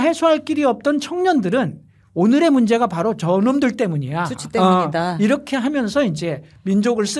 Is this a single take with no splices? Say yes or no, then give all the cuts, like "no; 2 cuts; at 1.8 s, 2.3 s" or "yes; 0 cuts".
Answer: yes; 0 cuts